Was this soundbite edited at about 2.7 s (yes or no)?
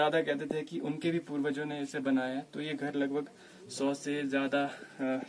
no